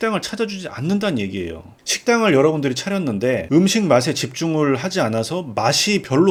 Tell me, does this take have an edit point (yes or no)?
no